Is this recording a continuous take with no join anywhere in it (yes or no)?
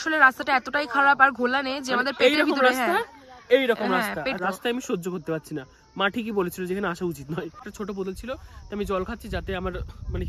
no